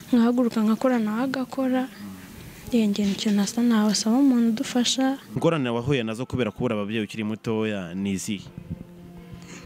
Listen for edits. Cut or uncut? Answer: cut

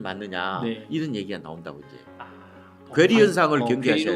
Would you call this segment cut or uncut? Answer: cut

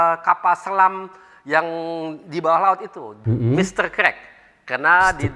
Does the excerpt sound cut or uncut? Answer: cut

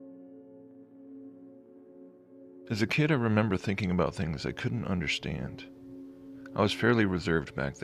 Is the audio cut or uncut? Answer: cut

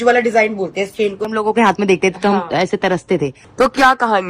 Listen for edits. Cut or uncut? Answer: cut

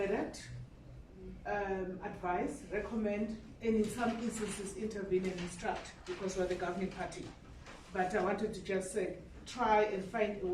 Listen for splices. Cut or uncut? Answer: uncut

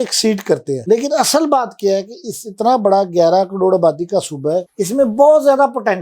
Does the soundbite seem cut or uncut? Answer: uncut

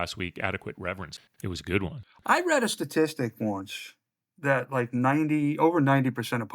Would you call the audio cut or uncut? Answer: cut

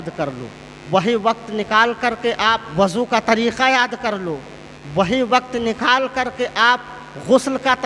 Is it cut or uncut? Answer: uncut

